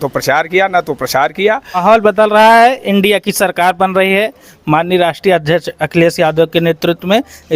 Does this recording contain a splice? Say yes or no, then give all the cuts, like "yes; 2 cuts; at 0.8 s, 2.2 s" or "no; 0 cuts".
yes; 1 cut; at 1.8 s